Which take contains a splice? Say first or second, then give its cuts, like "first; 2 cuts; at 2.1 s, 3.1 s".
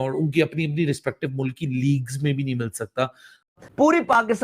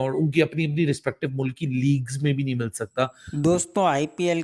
first; 1 cut; at 3.5 s